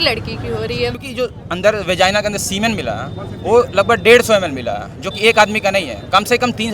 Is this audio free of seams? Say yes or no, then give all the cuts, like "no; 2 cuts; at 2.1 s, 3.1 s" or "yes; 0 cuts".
no; 1 cut; at 1.0 s